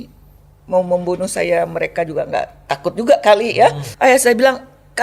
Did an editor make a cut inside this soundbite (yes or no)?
yes